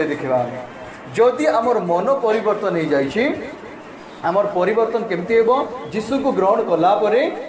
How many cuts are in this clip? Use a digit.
0